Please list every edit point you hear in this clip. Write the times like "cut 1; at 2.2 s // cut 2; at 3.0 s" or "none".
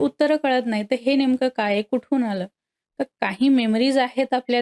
none